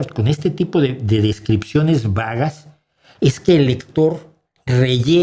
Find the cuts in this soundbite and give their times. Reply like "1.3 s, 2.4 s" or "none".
none